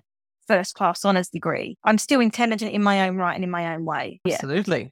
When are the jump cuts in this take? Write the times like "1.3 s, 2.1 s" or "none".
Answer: 1.7 s